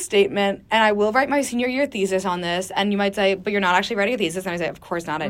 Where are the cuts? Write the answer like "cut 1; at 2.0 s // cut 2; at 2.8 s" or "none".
none